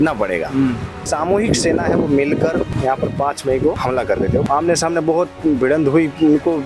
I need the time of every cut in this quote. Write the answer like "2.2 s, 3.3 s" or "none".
1.0 s, 2.7 s, 4.2 s